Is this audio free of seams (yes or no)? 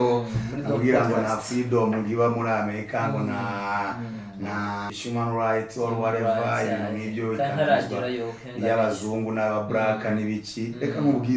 no